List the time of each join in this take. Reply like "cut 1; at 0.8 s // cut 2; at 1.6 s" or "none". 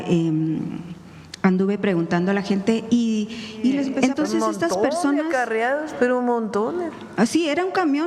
cut 1; at 3.9 s

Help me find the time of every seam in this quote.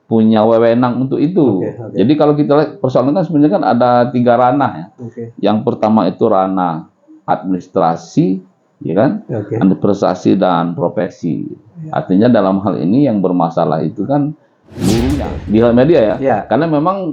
cut 1; at 15.3 s

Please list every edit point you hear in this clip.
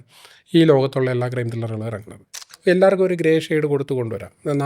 cut 1; at 2.5 s

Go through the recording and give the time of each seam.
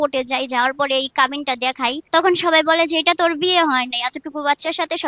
cut 1; at 2.0 s

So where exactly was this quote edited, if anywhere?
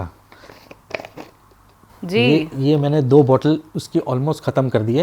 none

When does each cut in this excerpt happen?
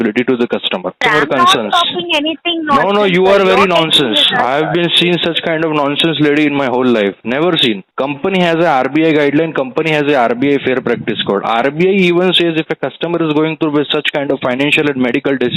cut 1; at 1.0 s // cut 2; at 7.9 s

